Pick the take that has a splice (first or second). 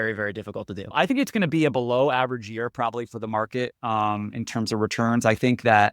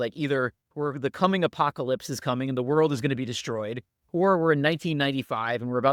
first